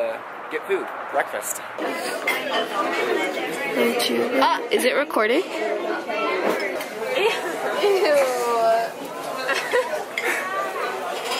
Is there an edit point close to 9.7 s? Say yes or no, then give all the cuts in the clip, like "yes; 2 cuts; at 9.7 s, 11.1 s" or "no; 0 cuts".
yes; 1 cut; at 9.7 s